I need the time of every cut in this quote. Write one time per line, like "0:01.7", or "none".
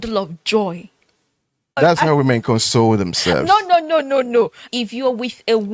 0:04.6

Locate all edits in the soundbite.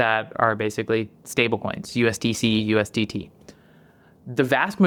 none

